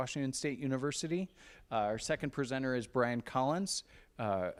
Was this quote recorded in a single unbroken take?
yes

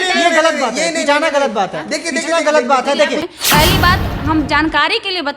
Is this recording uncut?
no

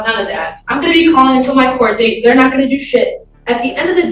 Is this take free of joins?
yes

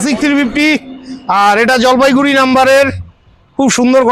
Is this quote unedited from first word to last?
yes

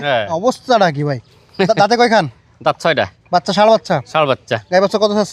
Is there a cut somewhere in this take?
no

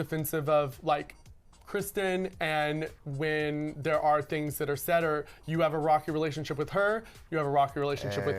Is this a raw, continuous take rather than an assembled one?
yes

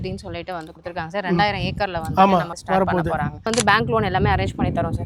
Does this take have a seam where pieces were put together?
yes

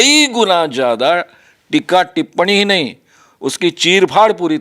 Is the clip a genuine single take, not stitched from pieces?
yes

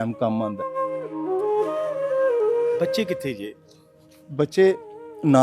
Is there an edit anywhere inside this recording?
yes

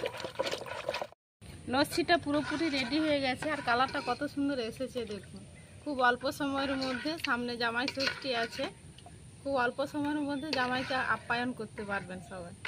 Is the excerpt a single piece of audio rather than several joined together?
no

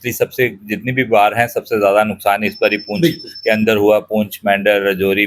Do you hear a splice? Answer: no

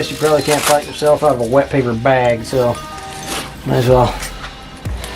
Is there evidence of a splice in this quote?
no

